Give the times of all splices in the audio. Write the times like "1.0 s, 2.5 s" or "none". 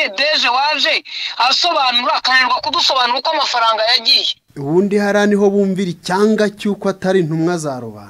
none